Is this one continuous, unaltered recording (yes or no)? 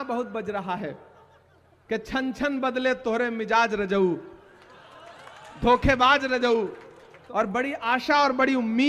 no